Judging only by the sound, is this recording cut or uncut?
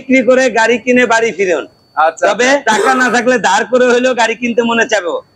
cut